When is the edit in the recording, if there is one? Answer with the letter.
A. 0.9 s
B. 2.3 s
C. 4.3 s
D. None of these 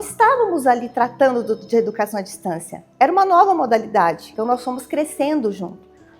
C